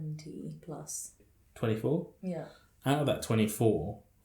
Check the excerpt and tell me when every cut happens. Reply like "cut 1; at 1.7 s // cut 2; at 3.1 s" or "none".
cut 1; at 1.2 s

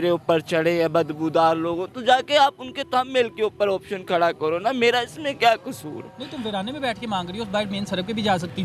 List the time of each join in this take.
none

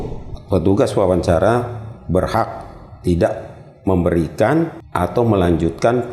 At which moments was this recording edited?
cut 1; at 4.8 s

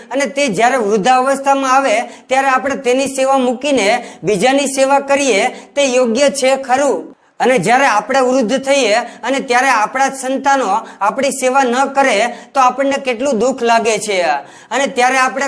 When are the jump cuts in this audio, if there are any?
none

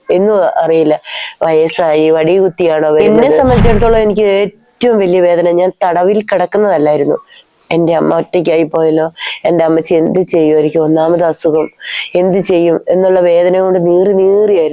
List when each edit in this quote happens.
cut 1; at 3.2 s

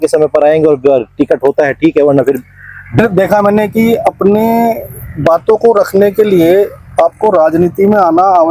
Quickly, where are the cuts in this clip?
cut 1; at 3.0 s

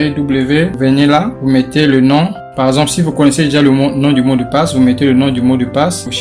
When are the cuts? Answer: none

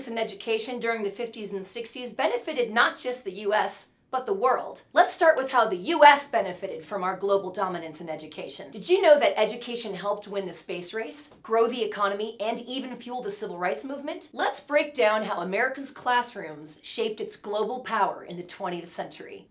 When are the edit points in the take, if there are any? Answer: none

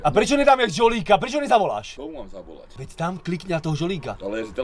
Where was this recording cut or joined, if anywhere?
cut 1; at 2.0 s

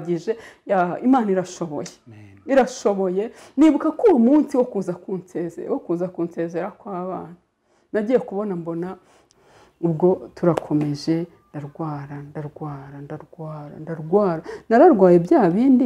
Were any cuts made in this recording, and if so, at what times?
cut 1; at 9.2 s

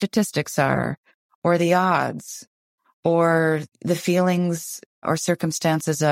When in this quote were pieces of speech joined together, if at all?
cut 1; at 3.7 s // cut 2; at 5.0 s

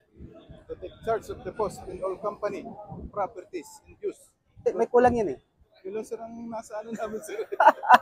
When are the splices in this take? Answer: cut 1; at 4.7 s // cut 2; at 5.7 s

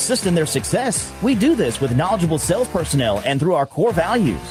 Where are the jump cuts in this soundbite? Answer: none

